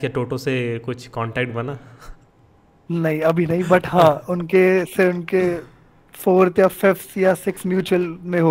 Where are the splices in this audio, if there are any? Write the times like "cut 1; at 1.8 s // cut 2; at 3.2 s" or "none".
none